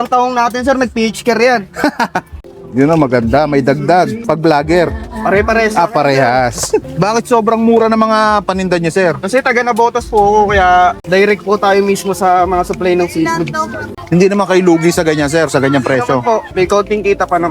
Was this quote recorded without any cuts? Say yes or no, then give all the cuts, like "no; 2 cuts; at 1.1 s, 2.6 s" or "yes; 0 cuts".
no; 3 cuts; at 4.2 s, 6.9 s, 16.5 s